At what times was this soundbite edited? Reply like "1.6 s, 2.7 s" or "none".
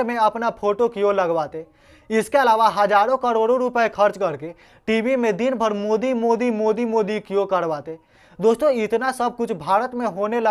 none